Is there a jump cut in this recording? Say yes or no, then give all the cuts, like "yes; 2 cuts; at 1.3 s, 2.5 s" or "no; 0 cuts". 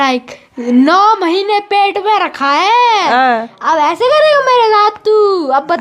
no; 0 cuts